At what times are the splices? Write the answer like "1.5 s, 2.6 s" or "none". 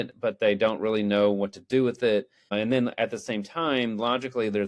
2.5 s